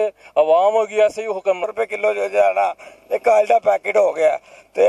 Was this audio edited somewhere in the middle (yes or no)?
yes